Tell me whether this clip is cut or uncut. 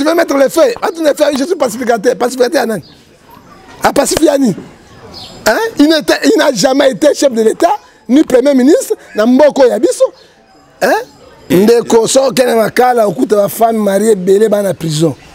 cut